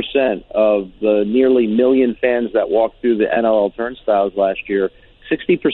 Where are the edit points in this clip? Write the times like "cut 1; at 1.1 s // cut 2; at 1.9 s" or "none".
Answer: none